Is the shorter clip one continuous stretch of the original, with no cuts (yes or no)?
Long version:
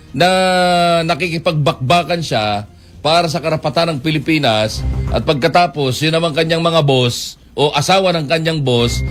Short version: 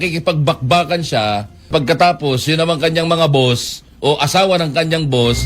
no